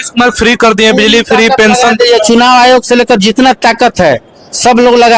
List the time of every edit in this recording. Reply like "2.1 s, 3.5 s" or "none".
none

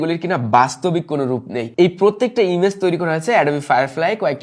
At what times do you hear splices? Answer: 1.6 s

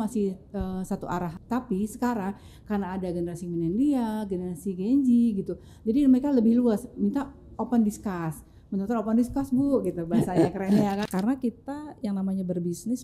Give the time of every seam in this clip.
1.4 s, 11.0 s

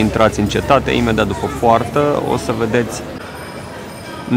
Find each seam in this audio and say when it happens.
3.2 s

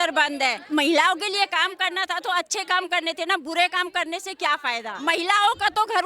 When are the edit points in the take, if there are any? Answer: 4.9 s

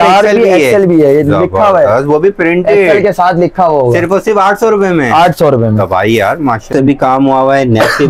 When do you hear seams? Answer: 6.7 s

